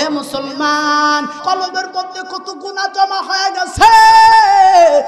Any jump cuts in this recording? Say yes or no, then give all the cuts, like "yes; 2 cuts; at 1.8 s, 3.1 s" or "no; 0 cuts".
yes; 1 cut; at 1.4 s